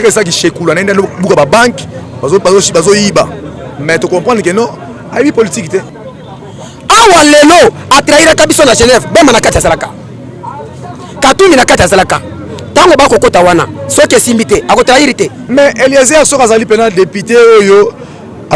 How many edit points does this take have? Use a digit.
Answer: 2